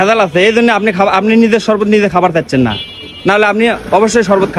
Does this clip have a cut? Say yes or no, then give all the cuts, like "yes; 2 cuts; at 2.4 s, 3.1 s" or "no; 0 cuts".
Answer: no; 0 cuts